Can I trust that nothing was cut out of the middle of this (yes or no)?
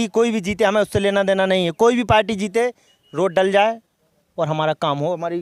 yes